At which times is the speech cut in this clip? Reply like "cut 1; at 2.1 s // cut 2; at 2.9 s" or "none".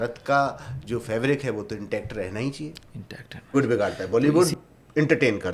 cut 1; at 3.5 s